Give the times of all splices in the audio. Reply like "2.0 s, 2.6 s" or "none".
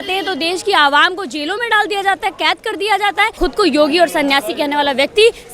3.3 s